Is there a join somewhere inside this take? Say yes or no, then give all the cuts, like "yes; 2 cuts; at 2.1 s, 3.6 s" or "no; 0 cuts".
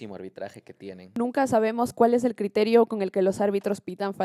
yes; 1 cut; at 1.0 s